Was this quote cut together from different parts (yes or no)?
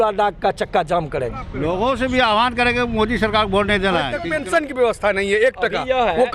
yes